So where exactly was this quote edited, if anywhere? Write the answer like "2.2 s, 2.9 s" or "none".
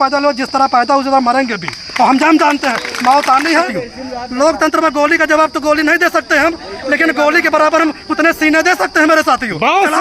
3.7 s